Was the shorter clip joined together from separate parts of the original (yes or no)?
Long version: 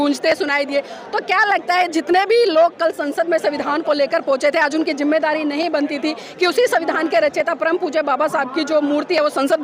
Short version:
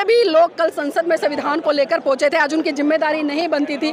no